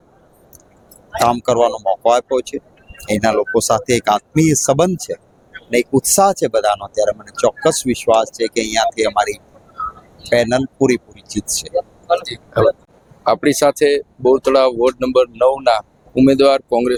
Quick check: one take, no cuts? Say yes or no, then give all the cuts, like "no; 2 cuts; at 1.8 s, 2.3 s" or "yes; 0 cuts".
yes; 0 cuts